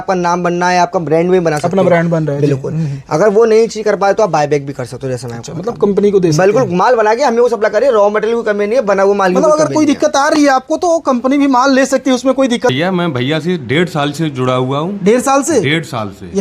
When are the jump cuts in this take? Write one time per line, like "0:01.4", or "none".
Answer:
0:12.7